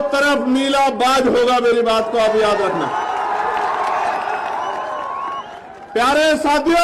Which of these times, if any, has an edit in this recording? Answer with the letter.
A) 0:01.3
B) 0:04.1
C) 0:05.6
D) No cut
D